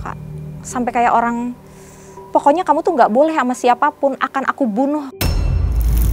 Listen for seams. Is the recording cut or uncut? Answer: cut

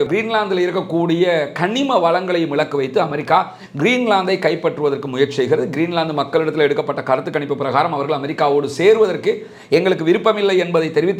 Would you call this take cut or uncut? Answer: uncut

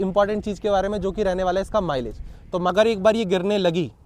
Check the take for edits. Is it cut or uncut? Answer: cut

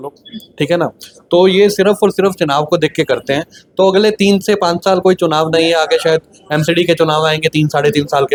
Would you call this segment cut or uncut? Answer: uncut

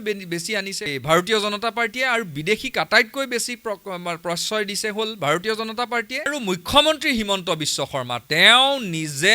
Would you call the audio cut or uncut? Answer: cut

